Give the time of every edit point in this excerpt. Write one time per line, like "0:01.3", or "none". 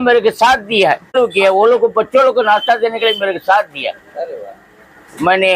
0:01.1